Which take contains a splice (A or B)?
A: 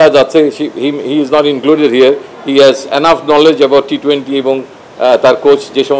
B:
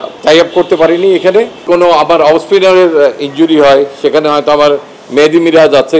B